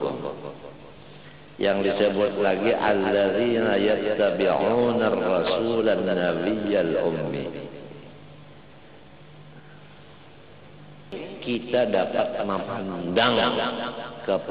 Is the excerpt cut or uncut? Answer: cut